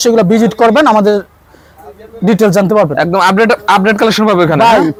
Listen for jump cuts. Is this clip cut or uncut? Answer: uncut